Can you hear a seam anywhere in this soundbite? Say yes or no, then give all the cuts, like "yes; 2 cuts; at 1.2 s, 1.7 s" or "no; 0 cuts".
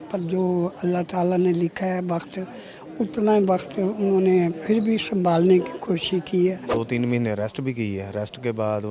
yes; 1 cut; at 6.6 s